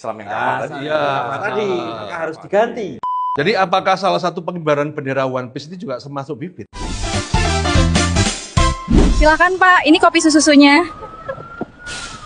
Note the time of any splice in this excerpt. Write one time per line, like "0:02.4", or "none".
0:03.1
0:06.9